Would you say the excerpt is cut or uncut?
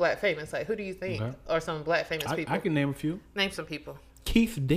uncut